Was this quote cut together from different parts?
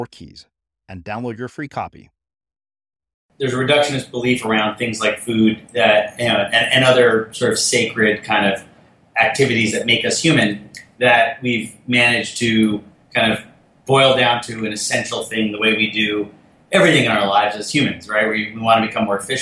yes; 1 cut; at 3.2 s

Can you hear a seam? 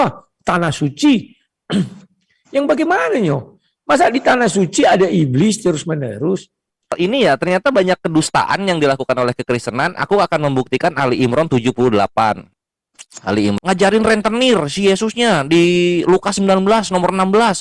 yes; 2 cuts; at 7.0 s, 13.6 s

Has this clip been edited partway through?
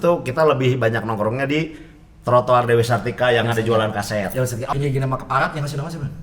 yes; 1 cut; at 4.7 s

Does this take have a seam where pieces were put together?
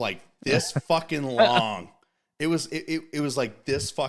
no; 0 cuts

